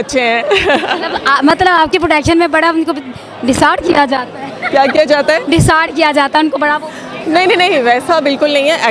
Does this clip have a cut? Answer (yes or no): no